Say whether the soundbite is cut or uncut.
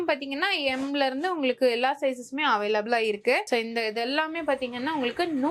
uncut